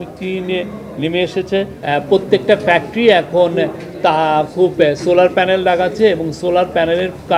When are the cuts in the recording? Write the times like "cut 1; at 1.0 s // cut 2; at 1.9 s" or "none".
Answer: cut 1; at 1.8 s